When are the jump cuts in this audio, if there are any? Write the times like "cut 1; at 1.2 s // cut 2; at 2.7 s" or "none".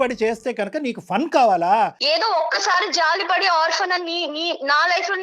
cut 1; at 2.0 s

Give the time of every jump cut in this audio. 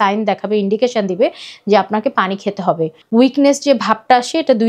cut 1; at 2.9 s

